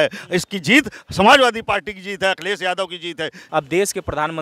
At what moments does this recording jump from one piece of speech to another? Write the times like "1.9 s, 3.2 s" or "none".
3.4 s